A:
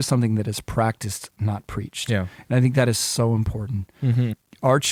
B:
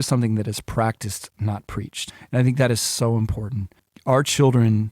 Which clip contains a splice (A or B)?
B